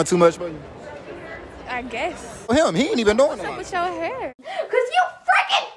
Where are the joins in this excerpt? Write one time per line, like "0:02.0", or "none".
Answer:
0:02.5